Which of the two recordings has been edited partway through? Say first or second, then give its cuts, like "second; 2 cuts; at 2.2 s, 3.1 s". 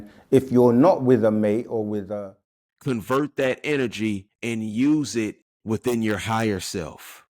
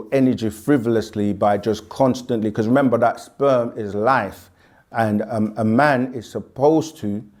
first; 3 cuts; at 2.1 s, 4.3 s, 5.5 s